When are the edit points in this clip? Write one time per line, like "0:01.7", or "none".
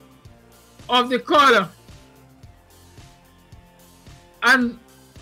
0:01.8
0:04.1